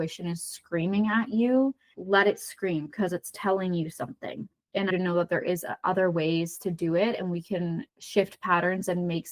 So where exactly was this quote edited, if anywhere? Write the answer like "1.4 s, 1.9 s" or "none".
1.9 s, 4.9 s